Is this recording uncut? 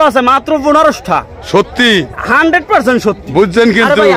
yes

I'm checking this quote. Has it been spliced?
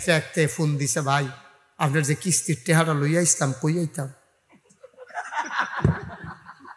no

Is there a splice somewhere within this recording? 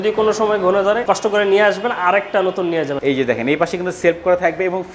yes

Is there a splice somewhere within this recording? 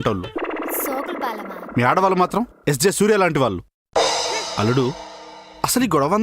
yes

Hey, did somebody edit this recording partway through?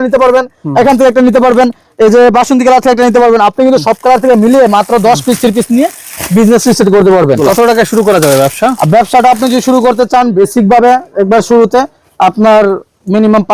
yes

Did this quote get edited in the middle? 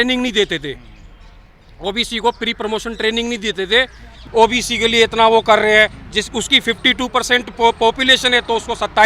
yes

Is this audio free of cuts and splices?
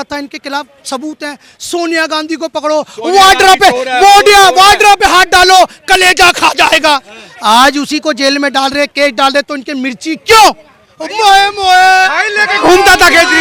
yes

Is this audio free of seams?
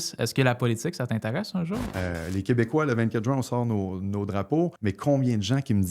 no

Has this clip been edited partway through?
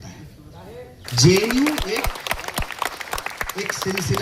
yes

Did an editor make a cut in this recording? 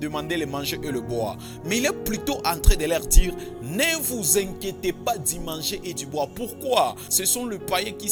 no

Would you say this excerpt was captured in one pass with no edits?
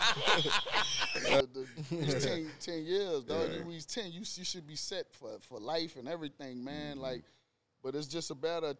no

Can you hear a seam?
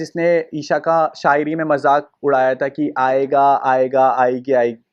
no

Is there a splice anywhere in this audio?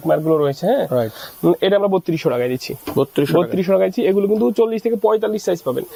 no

